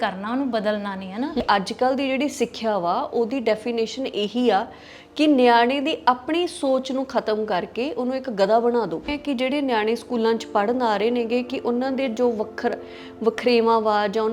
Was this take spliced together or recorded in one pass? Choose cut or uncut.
cut